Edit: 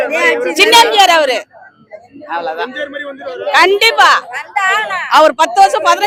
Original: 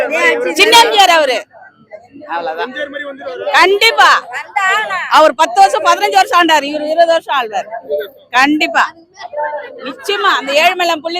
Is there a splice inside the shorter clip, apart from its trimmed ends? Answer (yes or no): no